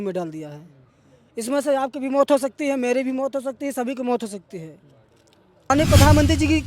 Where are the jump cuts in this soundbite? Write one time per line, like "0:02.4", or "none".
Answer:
0:05.7